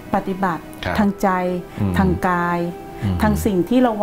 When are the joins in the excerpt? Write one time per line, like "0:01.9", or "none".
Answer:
none